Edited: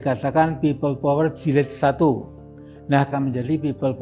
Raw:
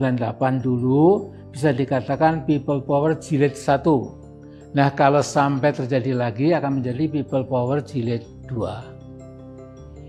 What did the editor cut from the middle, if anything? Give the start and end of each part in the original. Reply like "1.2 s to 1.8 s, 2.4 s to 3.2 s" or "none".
5.0 s to 6.6 s